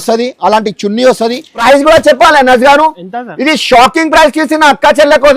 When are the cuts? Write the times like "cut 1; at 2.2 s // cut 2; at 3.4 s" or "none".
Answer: cut 1; at 1.6 s